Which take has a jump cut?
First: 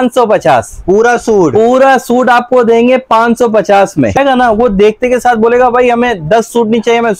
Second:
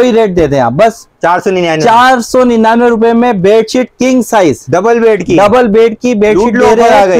first; 1 cut; at 4.2 s

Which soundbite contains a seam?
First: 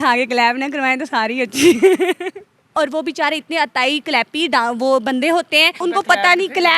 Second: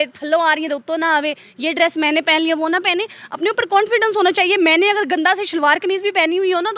first; 2 cuts; at 2.7 s, 5.8 s

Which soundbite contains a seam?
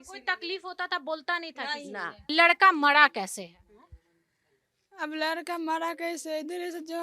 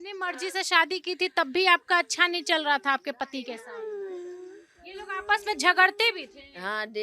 first; 1 cut; at 2.3 s

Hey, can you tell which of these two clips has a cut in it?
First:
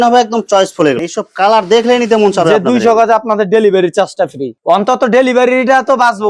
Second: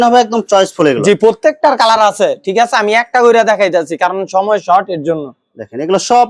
first; 1 cut; at 1.0 s

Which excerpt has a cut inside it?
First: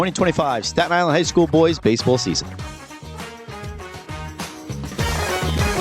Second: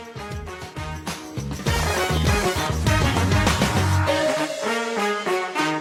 first; 1 cut; at 2.4 s

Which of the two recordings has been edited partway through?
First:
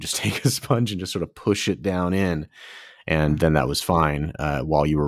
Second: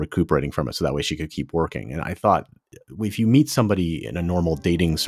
second; 1 cut; at 2.7 s

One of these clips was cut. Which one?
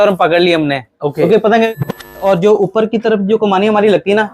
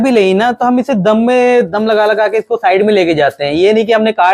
first; 1 cut; at 2.0 s

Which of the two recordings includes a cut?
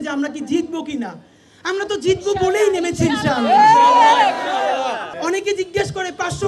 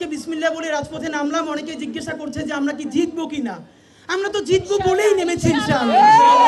first; 1 cut; at 5.1 s

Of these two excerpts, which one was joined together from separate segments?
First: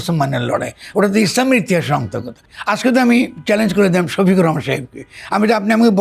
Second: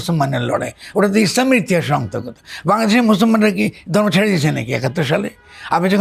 first; 1 cut; at 2.4 s

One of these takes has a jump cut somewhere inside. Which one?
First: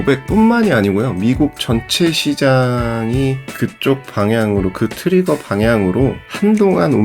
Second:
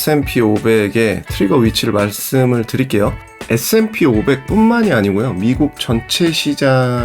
second; 1 cut; at 3.3 s

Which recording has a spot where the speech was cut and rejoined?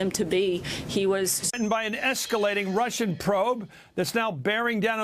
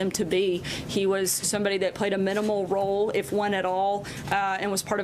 second; 1 cut; at 1.5 s

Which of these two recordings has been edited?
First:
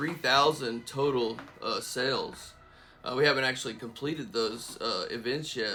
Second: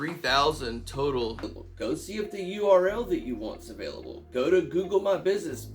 second; 1 cut; at 1.6 s

